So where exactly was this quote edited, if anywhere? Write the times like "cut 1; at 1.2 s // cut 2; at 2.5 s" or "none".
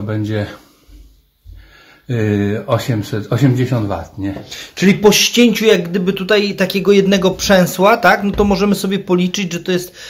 none